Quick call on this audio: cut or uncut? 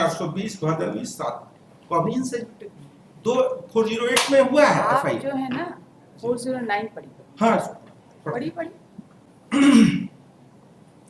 uncut